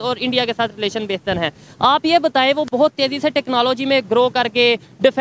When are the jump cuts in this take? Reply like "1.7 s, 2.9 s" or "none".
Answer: none